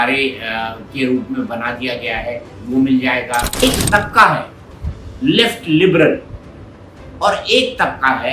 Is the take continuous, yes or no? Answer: no